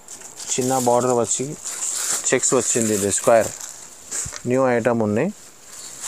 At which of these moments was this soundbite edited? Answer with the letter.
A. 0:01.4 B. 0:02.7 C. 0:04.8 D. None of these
D